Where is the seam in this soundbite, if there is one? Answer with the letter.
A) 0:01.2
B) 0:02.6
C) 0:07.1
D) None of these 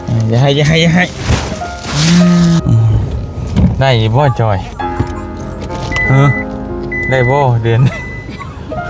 B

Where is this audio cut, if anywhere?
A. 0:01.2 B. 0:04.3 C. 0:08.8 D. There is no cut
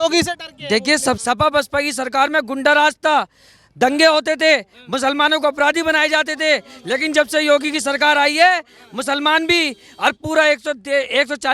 A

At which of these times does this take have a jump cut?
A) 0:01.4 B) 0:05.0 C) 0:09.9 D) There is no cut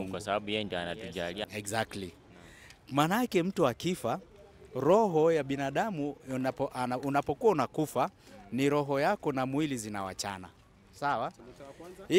A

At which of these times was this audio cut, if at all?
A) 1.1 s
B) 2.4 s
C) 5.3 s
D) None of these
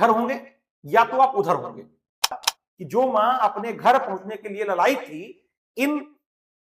B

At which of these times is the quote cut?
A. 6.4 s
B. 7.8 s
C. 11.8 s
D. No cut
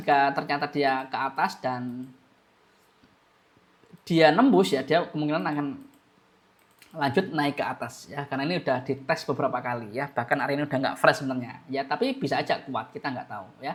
D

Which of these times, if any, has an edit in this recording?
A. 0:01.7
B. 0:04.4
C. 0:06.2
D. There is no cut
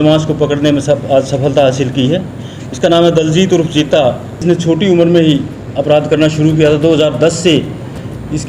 B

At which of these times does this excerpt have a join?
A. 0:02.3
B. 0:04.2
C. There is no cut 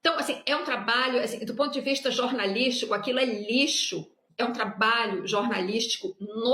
B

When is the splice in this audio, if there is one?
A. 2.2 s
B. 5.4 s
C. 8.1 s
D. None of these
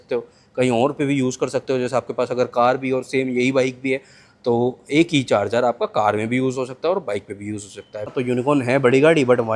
C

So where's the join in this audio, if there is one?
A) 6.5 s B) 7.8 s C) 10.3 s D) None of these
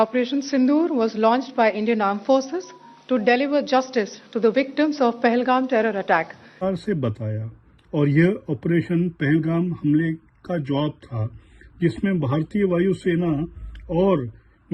A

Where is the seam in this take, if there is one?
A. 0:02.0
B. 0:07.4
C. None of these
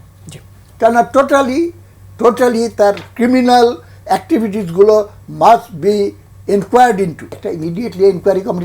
B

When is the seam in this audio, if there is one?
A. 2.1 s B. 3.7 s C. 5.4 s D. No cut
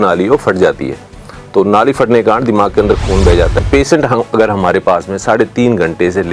B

